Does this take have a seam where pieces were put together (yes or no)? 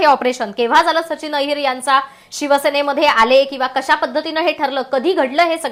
no